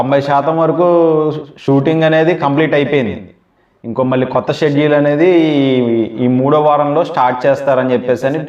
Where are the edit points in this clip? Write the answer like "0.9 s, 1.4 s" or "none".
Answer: none